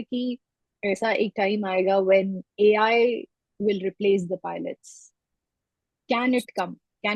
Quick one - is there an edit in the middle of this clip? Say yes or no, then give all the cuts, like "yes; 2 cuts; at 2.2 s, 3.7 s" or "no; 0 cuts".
no; 0 cuts